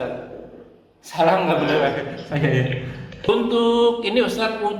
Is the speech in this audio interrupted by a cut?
yes; 1 cut; at 3.3 s

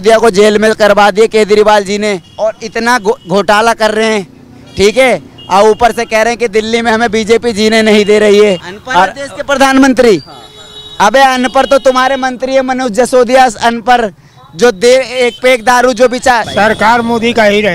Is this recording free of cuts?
no; 3 cuts; at 2.3 s, 8.7 s, 16.5 s

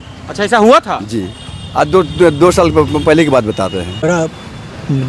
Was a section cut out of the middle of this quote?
yes; 1 cut; at 4.0 s

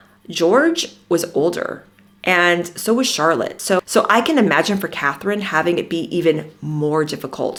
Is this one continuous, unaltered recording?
yes; 0 cuts

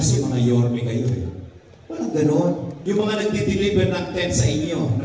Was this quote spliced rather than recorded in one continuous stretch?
yes; 1 cut; at 2.7 s

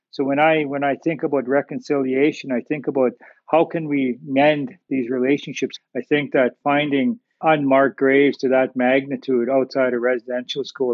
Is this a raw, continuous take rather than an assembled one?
no; 1 cut; at 5.7 s

